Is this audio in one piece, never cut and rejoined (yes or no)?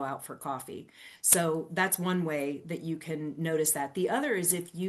yes